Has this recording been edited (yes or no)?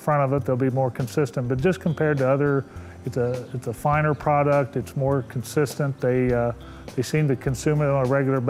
no